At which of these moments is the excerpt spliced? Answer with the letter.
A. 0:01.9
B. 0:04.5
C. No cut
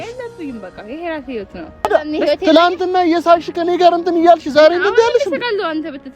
A